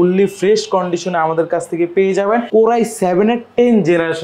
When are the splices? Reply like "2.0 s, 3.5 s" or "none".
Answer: 2.5 s